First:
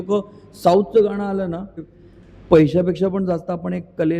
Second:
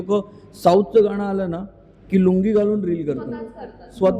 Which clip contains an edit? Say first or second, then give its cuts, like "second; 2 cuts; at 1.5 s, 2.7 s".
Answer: first; 1 cut; at 1.9 s